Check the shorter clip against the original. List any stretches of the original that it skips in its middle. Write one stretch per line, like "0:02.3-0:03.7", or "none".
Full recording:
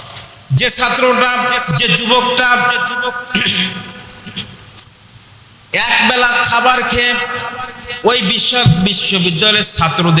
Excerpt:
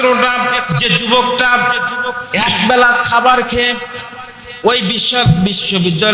0:03.2-0:05.6